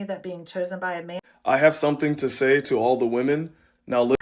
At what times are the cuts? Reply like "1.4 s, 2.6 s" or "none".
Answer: 1.2 s